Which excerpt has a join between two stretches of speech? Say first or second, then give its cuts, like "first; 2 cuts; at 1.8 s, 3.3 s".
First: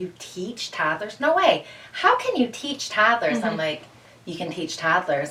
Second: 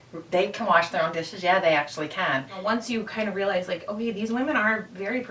second; 1 cut; at 2.6 s